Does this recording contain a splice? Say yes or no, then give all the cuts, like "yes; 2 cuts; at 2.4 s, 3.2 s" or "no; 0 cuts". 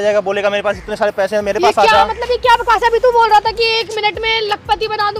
no; 0 cuts